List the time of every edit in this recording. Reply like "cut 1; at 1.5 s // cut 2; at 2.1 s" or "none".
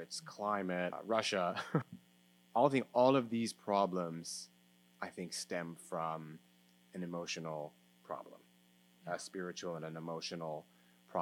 cut 1; at 1.0 s // cut 2; at 2.0 s